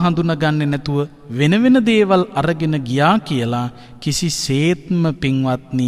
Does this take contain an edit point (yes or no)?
no